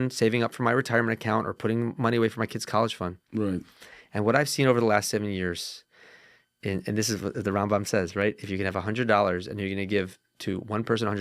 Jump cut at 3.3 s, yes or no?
no